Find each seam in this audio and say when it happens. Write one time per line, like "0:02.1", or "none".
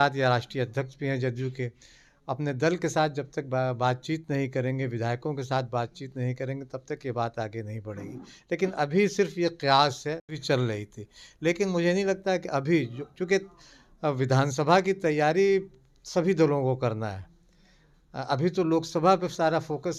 none

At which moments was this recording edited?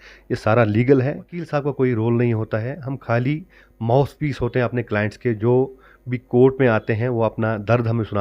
0:01.4

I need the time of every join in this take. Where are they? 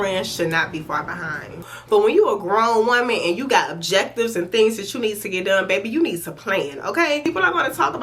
0:01.6
0:07.3

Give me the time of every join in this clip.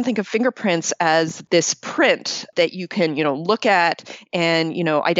0:01.4
0:02.5

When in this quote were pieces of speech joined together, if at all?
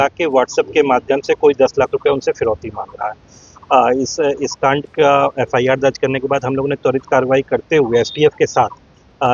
none

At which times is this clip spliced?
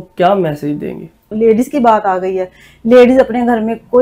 0:01.3

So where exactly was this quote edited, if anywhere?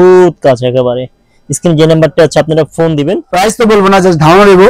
0:03.2

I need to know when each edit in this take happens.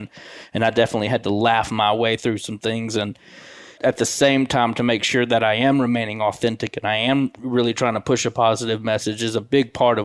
0:03.7

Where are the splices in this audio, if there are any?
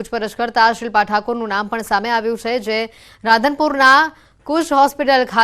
0:02.4

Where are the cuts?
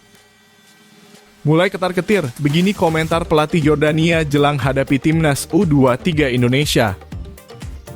0:01.4
0:07.0

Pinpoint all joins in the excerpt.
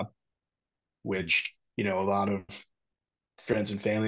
none

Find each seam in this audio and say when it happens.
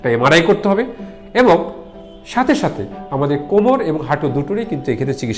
none

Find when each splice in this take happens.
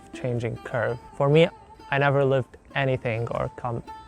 none

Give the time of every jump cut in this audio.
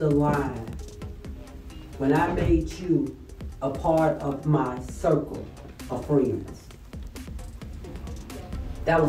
none

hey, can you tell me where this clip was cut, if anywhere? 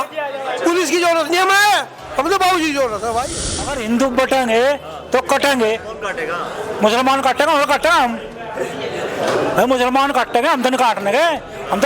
0:03.7

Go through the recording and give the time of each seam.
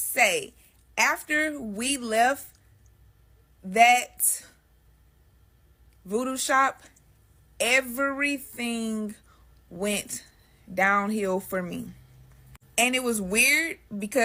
none

